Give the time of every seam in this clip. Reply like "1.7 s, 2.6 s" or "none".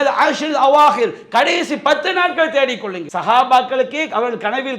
3.0 s